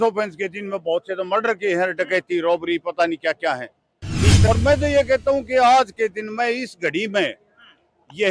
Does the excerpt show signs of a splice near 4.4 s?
yes; 1 cut; at 4.4 s

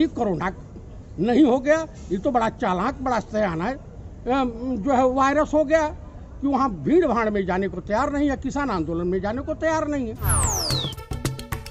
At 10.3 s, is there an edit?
yes; 1 cut; at 10.3 s

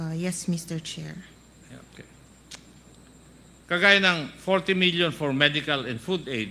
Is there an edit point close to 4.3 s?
no; 1 cut; at 2.9 s

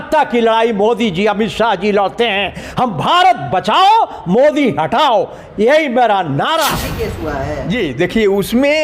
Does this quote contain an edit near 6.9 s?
yes; 1 cut; at 6.9 s

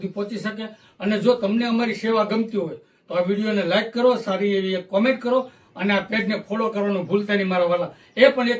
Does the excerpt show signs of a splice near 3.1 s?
no; 0 cuts

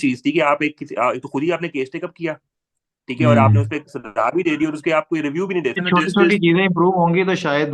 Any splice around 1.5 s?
no; 1 cut; at 5.8 s

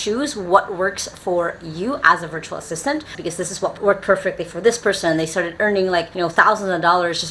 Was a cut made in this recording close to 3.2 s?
yes; 1 cut; at 3.2 s

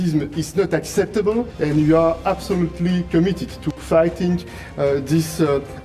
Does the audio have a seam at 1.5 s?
yes; 1 cut; at 1.5 s

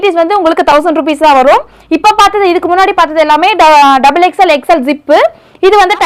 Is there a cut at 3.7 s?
no; 0 cuts

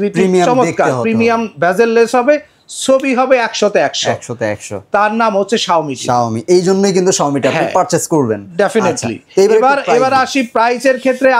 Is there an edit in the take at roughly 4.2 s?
no; 0 cuts

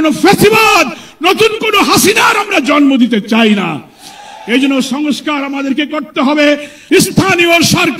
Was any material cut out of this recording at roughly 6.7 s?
yes; 1 cut; at 6.7 s

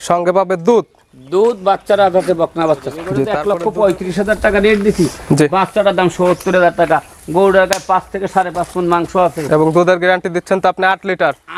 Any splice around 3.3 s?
yes; 1 cut; at 3.3 s

